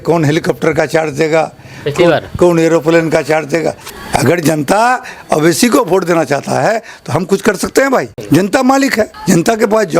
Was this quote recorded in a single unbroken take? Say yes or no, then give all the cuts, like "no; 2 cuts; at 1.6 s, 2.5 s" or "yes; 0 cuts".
no; 3 cuts; at 3.9 s, 8.2 s, 9.2 s